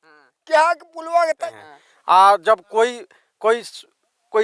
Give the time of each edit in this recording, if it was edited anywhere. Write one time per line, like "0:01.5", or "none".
0:01.4